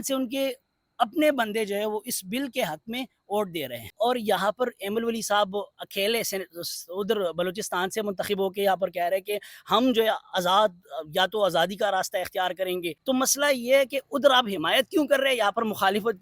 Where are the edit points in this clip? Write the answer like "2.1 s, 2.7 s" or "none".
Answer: 3.9 s, 12.9 s